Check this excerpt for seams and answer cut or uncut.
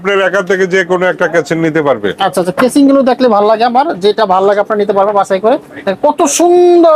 uncut